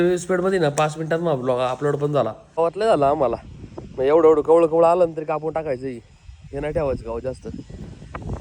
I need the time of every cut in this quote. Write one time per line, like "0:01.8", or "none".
0:02.4